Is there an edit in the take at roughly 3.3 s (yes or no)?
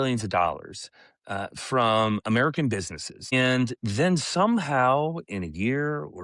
yes